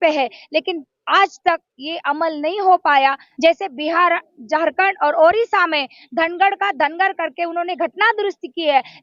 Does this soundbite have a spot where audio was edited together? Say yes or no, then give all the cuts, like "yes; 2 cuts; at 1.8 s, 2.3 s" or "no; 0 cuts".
yes; 1 cut; at 3.3 s